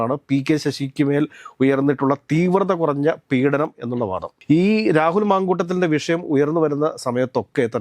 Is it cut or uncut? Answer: uncut